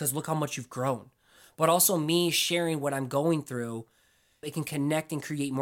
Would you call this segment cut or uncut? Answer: cut